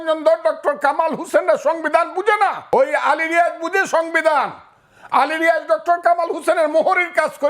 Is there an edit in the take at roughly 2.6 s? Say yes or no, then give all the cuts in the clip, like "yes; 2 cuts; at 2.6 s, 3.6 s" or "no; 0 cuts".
yes; 1 cut; at 2.6 s